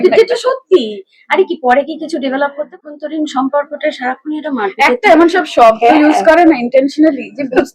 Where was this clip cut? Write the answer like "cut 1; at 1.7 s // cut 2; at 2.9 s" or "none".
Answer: cut 1; at 2.8 s